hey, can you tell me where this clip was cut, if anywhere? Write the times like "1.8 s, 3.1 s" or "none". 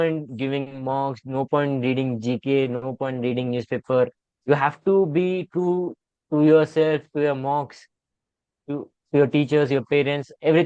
none